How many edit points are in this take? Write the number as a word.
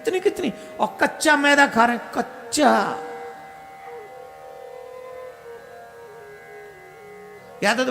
zero